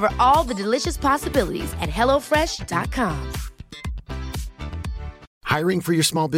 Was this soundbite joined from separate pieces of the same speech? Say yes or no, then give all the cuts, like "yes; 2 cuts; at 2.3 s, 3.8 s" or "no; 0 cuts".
yes; 1 cut; at 5.3 s